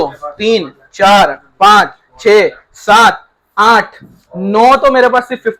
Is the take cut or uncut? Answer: uncut